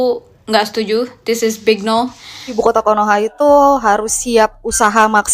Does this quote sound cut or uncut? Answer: cut